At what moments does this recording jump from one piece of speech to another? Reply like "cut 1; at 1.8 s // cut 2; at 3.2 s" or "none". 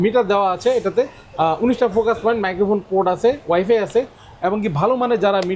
none